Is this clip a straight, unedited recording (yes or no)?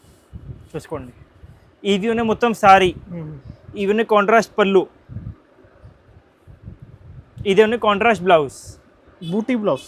yes